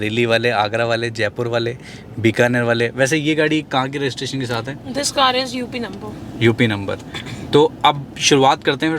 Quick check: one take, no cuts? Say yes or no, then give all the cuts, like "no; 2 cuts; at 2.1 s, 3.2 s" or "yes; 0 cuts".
yes; 0 cuts